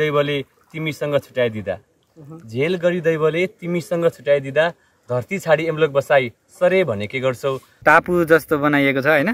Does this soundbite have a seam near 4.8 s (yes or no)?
no